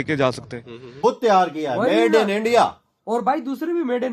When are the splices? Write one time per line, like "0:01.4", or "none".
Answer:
0:01.0